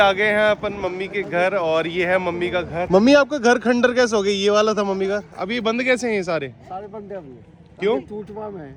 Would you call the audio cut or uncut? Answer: uncut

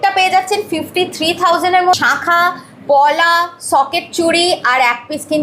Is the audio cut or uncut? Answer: cut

